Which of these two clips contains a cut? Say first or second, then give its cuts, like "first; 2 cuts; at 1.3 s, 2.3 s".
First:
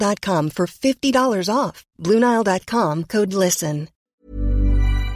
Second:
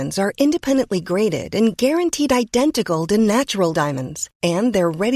first; 1 cut; at 3.9 s